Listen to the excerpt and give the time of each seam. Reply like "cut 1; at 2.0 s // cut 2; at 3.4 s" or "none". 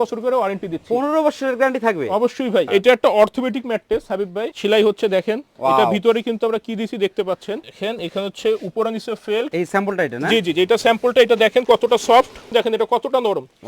cut 1; at 2.7 s // cut 2; at 4.5 s // cut 3; at 7.7 s // cut 4; at 9.5 s // cut 5; at 12.4 s